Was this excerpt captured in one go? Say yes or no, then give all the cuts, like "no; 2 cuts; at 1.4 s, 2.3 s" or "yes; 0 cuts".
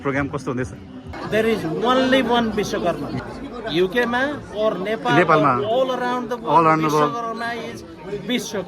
no; 2 cuts; at 1.1 s, 3.1 s